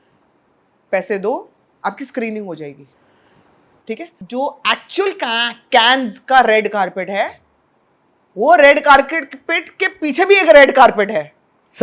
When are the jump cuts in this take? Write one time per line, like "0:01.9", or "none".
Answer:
0:04.1